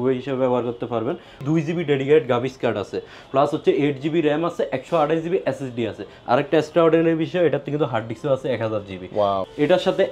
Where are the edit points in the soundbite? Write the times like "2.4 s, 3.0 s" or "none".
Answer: 1.4 s, 9.4 s